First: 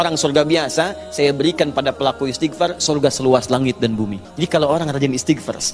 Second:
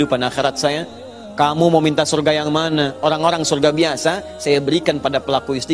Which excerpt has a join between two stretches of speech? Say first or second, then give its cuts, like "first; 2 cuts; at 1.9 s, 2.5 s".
first; 1 cut; at 4.2 s